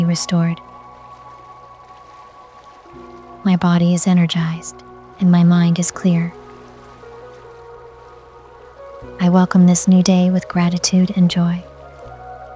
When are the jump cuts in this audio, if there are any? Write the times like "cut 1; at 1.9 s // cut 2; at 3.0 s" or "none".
none